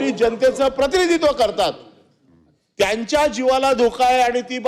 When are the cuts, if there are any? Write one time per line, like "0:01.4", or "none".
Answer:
none